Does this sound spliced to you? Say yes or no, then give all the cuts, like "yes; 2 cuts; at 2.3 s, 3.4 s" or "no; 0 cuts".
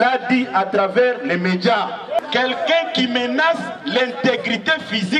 yes; 1 cut; at 2.2 s